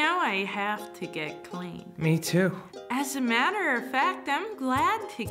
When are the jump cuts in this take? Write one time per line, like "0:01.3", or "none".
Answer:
none